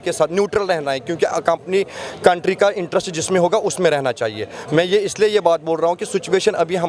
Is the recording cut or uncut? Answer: uncut